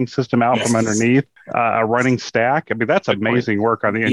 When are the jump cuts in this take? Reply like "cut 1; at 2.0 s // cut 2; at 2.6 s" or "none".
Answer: cut 1; at 1.4 s

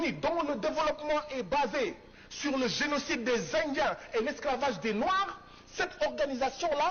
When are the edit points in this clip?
none

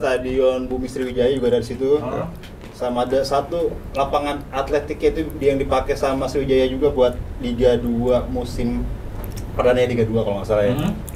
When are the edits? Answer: none

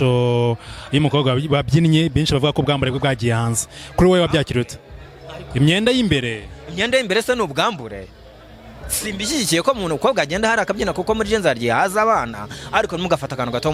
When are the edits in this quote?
none

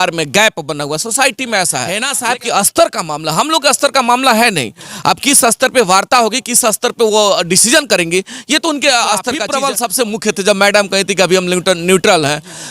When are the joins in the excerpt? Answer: cut 1; at 2.1 s // cut 2; at 9.5 s

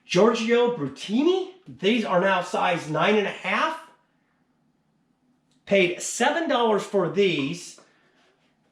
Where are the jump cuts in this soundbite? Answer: cut 1; at 1.6 s

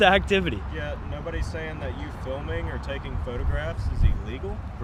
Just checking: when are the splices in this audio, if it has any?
none

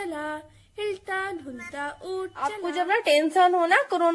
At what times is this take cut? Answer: cut 1; at 2.6 s

